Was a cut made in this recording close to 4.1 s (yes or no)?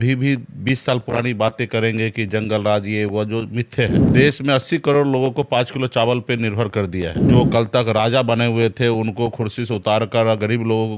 yes